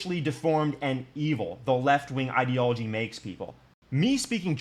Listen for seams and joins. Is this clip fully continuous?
no; 1 cut; at 3.7 s

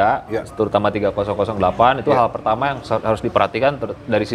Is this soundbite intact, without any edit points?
yes; 0 cuts

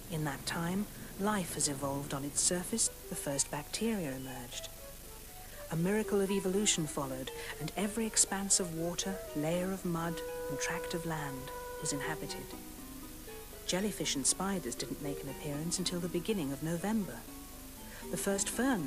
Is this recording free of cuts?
yes; 0 cuts

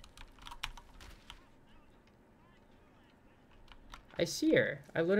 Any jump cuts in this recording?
no; 0 cuts

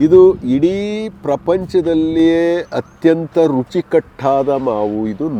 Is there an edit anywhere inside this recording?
no; 0 cuts

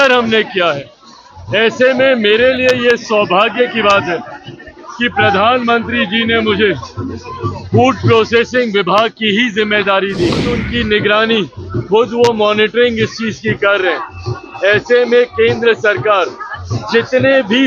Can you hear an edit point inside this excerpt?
yes; 1 cut; at 10.6 s

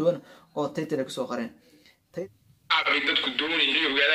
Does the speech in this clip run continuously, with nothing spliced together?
no; 1 cut; at 2.1 s

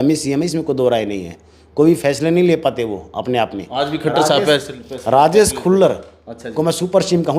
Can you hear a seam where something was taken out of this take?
no; 0 cuts

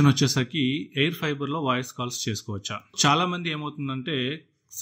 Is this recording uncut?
no; 1 cut; at 2.8 s

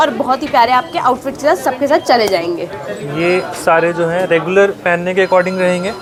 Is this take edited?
no; 0 cuts

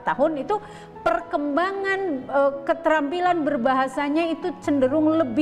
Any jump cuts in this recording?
no; 0 cuts

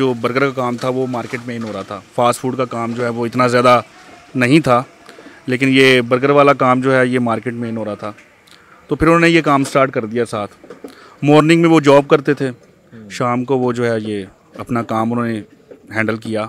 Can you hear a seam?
no; 0 cuts

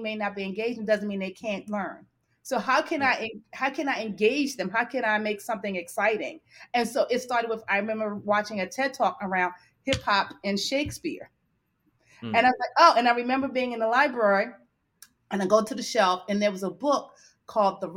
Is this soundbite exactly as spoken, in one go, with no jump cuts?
yes; 0 cuts

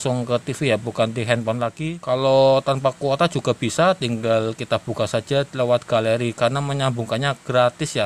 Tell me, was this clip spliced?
yes; 1 cut; at 1.9 s

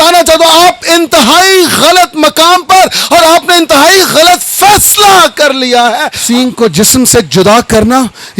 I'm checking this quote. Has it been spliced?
yes; 1 cut; at 6.1 s

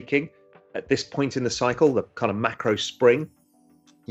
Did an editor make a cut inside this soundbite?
no; 0 cuts

